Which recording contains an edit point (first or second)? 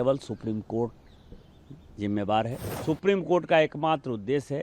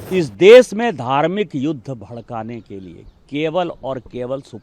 first